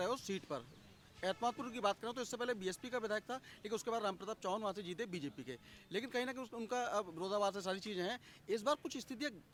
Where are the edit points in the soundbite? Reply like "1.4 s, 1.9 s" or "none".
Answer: none